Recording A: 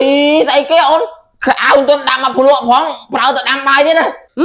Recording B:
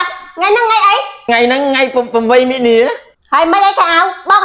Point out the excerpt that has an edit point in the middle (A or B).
B